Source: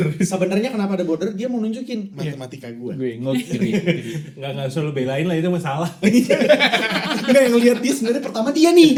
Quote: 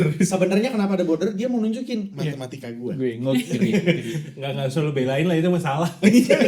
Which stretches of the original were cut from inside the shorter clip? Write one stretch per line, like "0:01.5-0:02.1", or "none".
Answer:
none